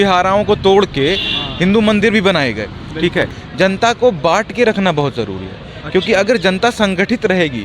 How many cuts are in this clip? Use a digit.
1